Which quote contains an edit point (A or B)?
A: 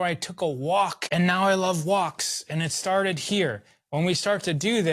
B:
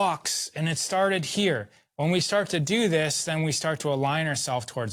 A